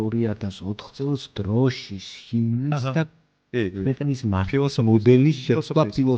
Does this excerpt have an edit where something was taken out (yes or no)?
no